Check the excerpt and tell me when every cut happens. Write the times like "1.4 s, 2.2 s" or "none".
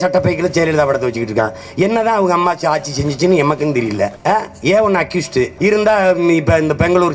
5.5 s